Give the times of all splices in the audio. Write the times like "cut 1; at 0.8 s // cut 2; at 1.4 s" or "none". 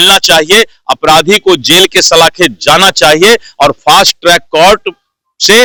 none